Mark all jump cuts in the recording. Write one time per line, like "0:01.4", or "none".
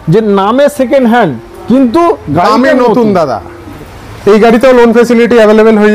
0:03.8

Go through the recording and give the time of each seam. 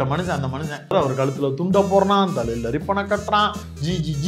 0:00.9

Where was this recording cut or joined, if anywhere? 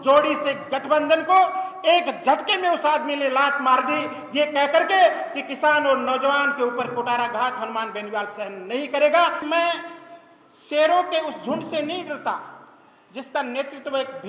0:09.4

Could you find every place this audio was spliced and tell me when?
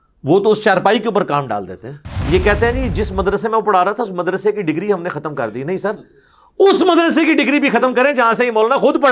0:02.1

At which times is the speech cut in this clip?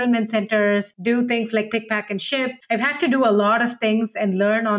0:00.9
0:02.6

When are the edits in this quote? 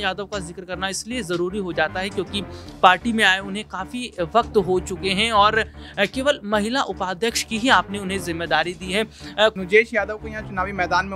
0:09.6

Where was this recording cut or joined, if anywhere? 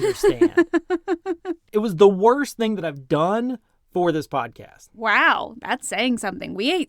0:01.7

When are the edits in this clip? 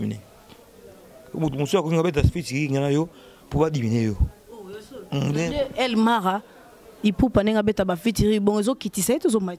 none

